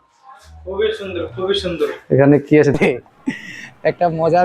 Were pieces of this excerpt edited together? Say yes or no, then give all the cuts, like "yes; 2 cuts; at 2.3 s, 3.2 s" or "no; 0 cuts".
yes; 1 cut; at 2.7 s